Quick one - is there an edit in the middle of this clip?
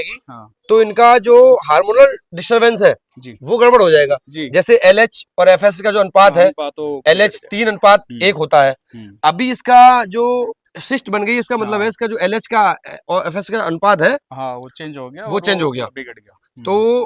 no; 0 cuts

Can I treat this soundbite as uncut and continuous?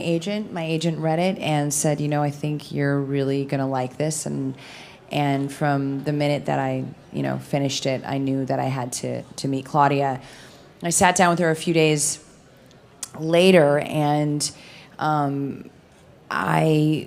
no; 1 cut; at 3.0 s

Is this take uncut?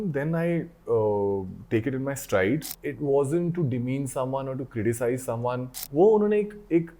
no; 2 cuts; at 2.7 s, 5.9 s

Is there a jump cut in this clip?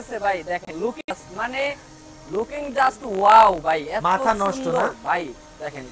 no; 0 cuts

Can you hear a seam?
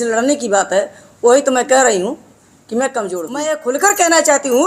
yes; 1 cut; at 3.3 s

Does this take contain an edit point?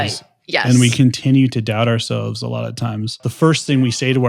yes; 1 cut; at 3.2 s

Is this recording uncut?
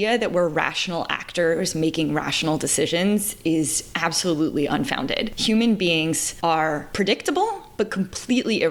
no; 2 cuts; at 5.3 s, 6.6 s

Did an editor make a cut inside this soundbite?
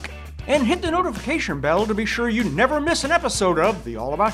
no; 0 cuts

